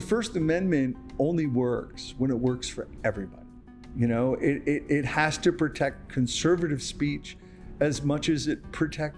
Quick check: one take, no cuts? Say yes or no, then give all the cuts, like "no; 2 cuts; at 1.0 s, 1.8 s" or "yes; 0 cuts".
yes; 0 cuts